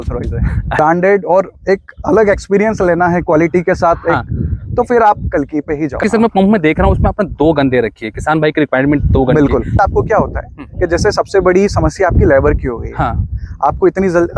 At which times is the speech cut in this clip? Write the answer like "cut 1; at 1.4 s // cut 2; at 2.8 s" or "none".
cut 1; at 0.7 s // cut 2; at 6.0 s // cut 3; at 9.8 s

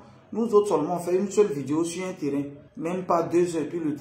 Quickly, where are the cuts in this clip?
cut 1; at 2.6 s

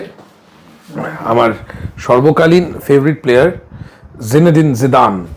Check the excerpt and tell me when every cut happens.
none

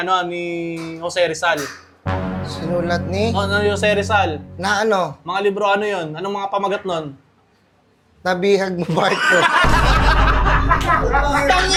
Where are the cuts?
none

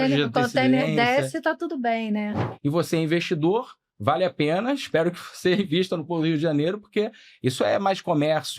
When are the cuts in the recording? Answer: cut 1; at 2.5 s

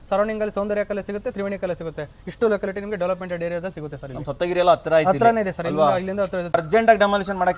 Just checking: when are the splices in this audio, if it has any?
cut 1; at 6.5 s

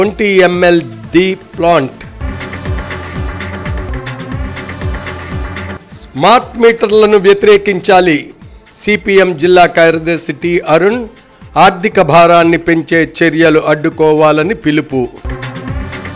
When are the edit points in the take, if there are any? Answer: none

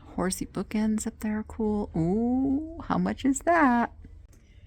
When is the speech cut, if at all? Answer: none

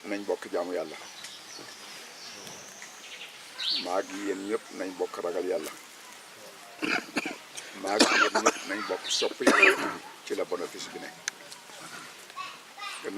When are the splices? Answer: none

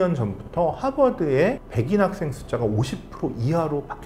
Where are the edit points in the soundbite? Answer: none

